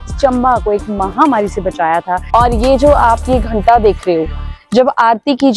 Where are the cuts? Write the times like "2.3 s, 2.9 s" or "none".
2.2 s

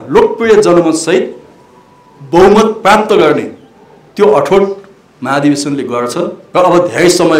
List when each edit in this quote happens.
6.4 s

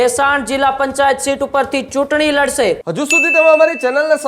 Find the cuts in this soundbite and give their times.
2.9 s

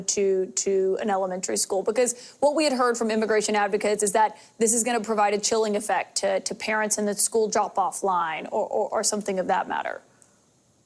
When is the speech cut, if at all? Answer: none

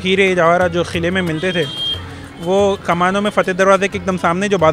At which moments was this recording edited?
none

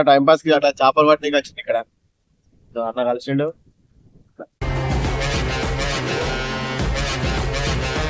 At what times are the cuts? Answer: 4.6 s

